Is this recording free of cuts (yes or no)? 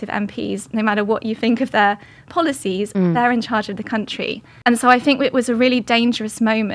no